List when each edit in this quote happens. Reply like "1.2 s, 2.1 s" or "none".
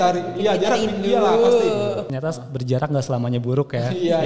2.0 s